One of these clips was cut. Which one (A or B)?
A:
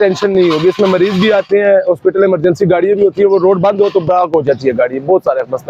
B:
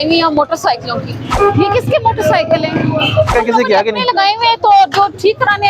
B